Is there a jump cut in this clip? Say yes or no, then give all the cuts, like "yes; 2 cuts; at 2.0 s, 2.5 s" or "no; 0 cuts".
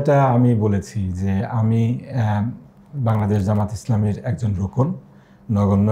no; 0 cuts